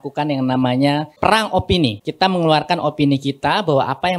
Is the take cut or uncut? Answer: cut